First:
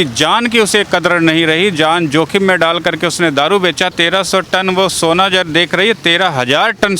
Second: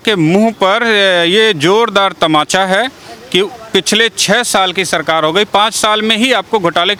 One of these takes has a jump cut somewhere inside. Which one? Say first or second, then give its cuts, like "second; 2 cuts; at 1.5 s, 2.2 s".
first; 1 cut; at 3.9 s